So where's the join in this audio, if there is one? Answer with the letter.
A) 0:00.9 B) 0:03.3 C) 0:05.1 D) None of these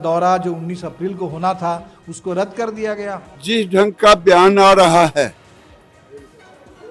B